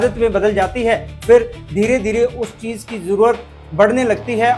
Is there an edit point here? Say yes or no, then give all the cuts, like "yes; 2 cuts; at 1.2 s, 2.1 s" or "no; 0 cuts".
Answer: no; 0 cuts